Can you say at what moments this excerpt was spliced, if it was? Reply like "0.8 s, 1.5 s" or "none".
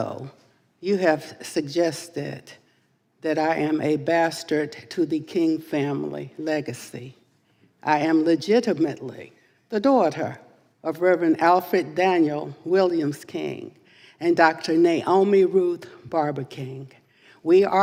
none

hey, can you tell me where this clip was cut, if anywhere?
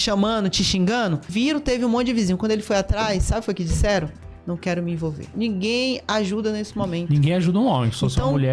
5.3 s

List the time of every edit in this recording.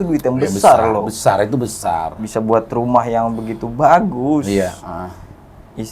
none

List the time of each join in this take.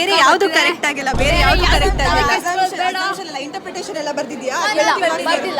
none

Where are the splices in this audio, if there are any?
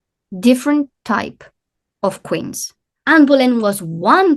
2.9 s

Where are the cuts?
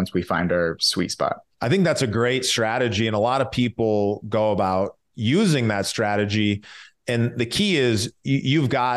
1.5 s

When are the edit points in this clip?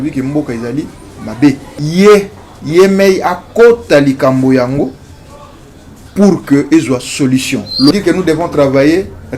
1.8 s, 7.9 s

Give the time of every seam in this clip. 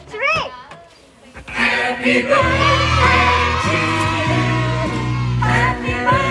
none

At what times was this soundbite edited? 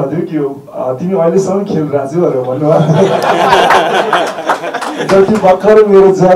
none

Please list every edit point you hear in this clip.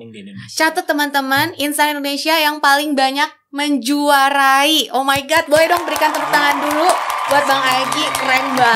none

